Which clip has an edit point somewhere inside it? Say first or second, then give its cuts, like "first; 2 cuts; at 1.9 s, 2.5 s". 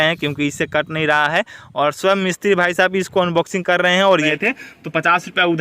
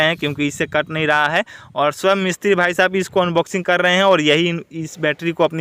first; 1 cut; at 4.3 s